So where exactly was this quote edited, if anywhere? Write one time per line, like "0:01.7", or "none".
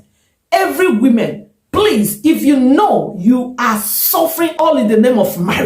0:04.6